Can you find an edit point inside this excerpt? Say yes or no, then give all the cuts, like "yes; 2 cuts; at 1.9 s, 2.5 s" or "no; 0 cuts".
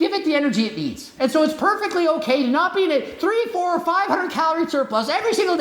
yes; 1 cut; at 1.0 s